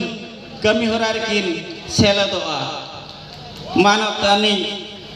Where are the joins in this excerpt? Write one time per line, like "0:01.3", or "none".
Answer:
none